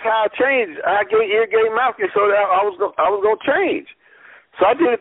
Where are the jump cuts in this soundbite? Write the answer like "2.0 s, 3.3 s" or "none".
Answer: none